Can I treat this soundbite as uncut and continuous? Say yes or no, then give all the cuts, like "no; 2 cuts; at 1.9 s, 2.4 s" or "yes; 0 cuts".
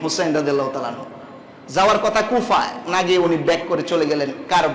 yes; 0 cuts